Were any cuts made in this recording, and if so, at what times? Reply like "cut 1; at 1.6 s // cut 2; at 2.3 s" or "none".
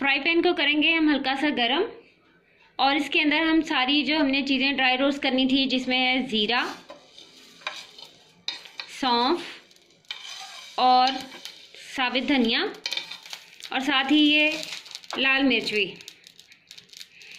none